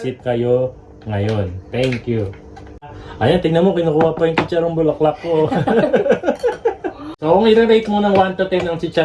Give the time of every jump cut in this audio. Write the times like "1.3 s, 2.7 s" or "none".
3.0 s, 7.2 s